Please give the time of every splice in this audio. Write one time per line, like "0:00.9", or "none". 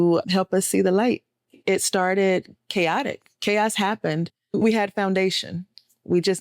0:01.6
0:04.6